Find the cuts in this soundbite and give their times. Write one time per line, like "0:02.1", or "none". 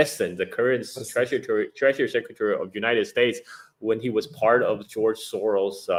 none